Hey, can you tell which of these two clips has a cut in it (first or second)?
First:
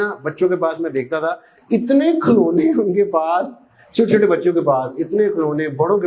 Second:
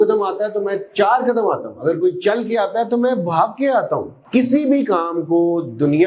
second